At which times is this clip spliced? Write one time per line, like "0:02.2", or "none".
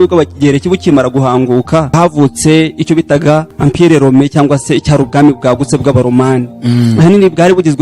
0:01.9